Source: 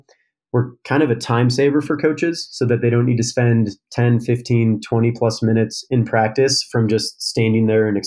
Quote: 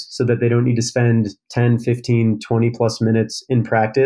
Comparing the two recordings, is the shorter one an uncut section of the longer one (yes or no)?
yes